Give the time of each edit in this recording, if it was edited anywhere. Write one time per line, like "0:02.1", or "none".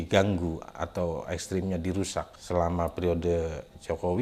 none